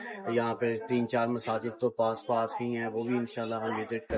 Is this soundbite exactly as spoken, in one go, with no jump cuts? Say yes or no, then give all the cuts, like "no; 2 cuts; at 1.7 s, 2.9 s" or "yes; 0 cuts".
yes; 0 cuts